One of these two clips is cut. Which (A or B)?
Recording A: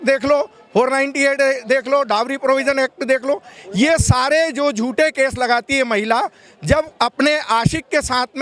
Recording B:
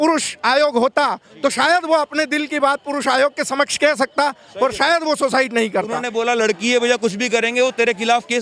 B